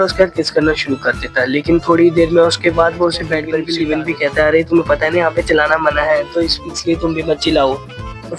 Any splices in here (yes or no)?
yes